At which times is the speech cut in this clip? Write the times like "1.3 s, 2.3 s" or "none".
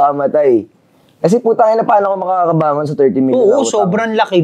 none